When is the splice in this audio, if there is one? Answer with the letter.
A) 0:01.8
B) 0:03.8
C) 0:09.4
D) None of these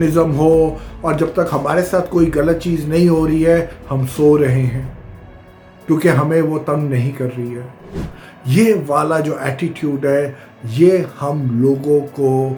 D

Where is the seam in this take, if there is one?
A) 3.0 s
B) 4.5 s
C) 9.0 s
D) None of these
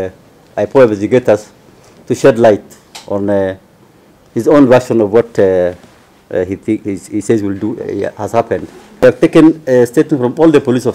C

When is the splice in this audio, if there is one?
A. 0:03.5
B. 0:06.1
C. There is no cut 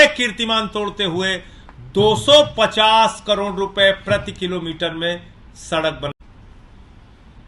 B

